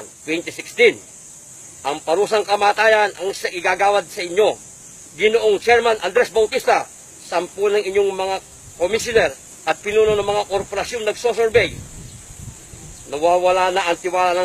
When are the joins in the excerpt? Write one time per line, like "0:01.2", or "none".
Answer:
0:10.7

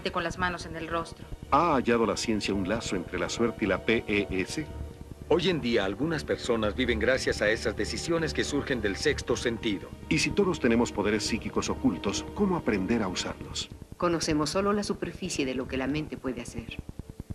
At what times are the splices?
0:12.9

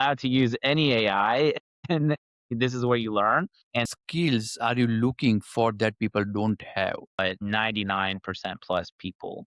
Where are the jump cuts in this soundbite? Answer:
0:03.9
0:07.2

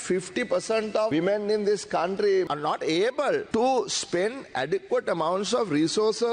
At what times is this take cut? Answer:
0:01.1
0:02.5
0:03.5

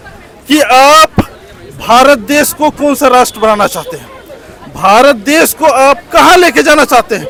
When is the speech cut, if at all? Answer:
none

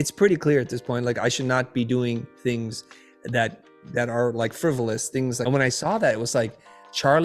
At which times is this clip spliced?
0:05.4

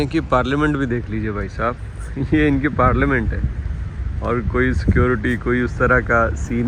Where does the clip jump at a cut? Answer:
none

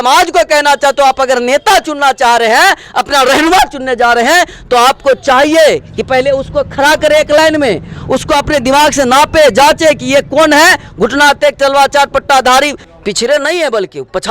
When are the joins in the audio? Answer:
0:12.8

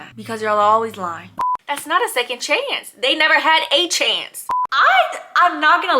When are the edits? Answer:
0:01.3
0:04.6

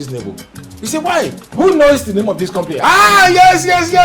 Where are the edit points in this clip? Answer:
0:01.4

